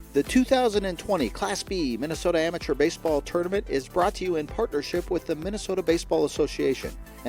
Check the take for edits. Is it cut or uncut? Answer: uncut